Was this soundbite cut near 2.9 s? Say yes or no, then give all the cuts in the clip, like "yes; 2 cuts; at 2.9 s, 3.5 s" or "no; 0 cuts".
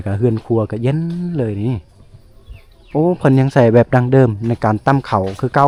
no; 0 cuts